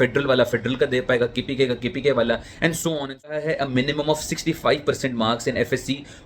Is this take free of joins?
no; 1 cut; at 3.4 s

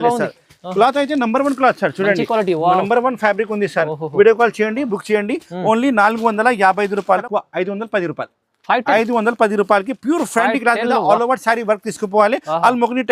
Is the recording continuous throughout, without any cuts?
no; 1 cut; at 7.2 s

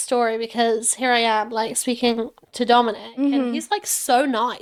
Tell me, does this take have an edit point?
no; 0 cuts

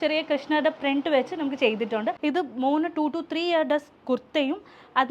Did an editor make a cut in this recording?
yes; 1 cut; at 2.2 s

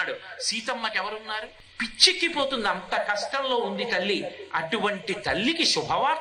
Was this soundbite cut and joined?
yes; 1 cut; at 1.6 s

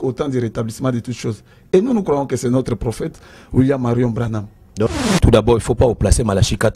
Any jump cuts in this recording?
yes; 1 cut; at 4.9 s

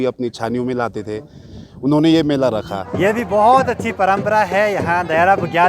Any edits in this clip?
yes; 1 cut; at 2.8 s

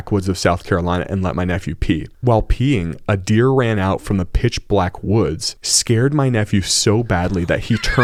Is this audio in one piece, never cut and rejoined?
yes; 0 cuts

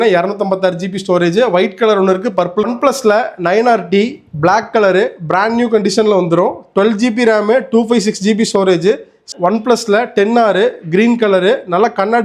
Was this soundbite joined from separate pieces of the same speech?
yes; 2 cuts; at 2.7 s, 9.3 s

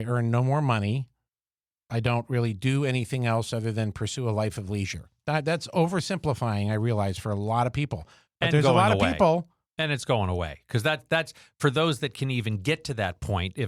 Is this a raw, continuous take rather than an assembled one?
yes; 0 cuts

